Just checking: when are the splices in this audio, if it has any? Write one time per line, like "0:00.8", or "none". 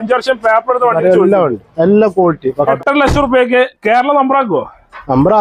0:02.8